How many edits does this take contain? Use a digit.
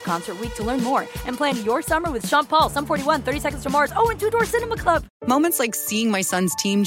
1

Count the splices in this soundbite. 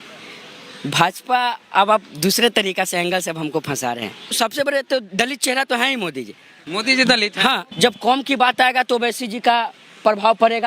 2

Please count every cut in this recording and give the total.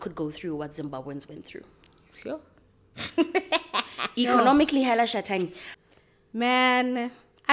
1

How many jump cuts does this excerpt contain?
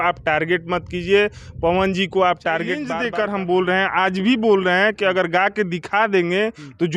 1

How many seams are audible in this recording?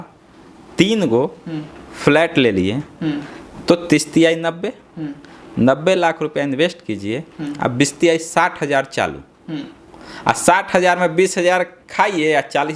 0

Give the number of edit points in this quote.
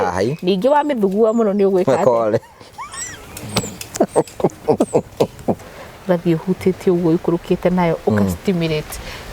1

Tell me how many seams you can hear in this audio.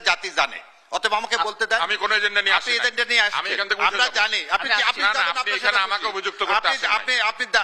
0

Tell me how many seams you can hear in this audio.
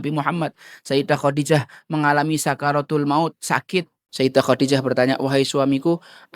1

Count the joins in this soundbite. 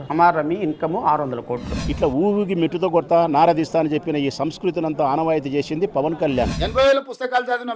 2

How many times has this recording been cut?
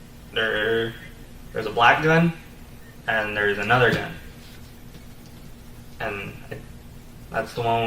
1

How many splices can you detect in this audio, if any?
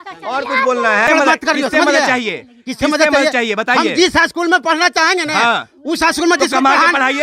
1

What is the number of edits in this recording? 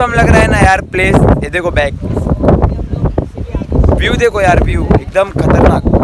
0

